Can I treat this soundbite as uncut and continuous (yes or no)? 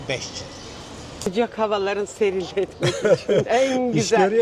no